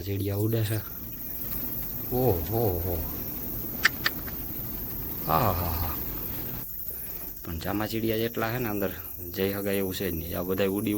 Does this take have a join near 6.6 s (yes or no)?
yes